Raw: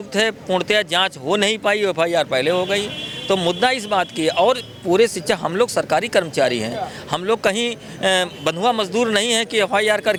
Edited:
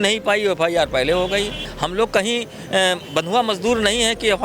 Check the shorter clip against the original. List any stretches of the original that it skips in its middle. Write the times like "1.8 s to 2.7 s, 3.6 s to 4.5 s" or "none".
3.1 s to 7.0 s